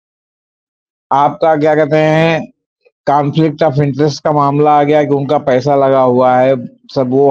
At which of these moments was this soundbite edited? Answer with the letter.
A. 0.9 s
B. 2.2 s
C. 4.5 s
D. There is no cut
D